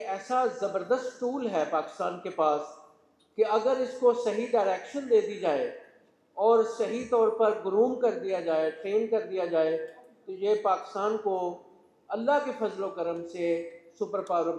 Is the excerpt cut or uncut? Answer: uncut